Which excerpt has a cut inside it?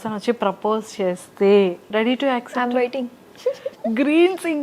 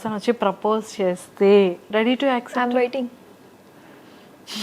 first; 1 cut; at 3.2 s

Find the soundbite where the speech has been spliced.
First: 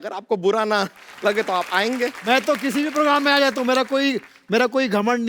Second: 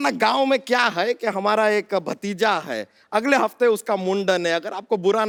first; 1 cut; at 2.2 s

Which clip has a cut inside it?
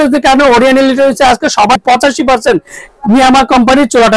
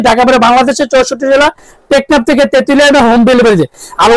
first; 1 cut; at 1.8 s

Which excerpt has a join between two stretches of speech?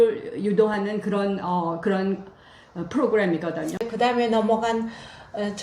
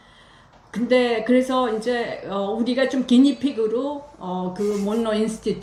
first; 1 cut; at 3.8 s

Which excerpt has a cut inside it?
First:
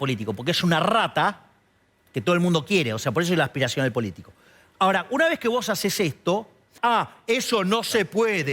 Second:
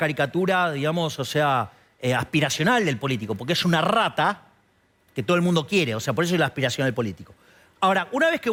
first; 1 cut; at 6.7 s

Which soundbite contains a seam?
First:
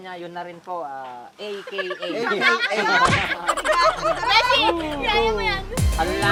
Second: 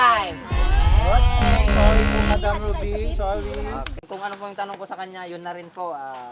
second; 1 cut; at 3.9 s

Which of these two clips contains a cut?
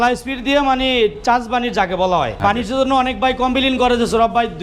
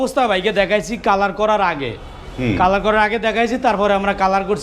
first; 1 cut; at 2.4 s

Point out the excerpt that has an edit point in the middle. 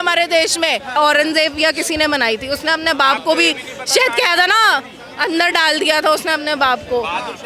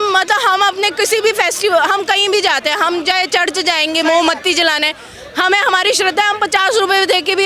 first; 1 cut; at 1.0 s

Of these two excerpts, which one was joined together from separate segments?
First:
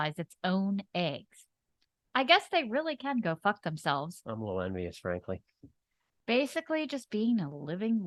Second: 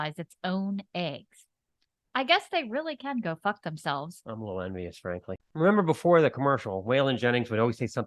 second; 1 cut; at 5.4 s

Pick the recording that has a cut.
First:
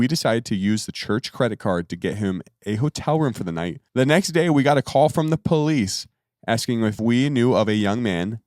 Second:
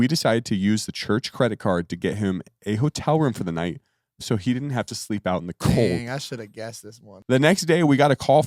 first; 2 cuts; at 3.8 s, 7.0 s

